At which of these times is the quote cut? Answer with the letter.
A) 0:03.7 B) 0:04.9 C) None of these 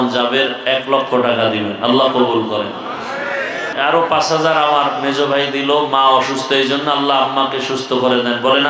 A